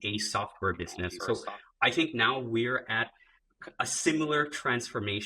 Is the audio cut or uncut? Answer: cut